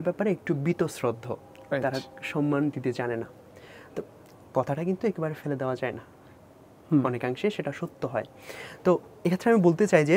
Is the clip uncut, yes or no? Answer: yes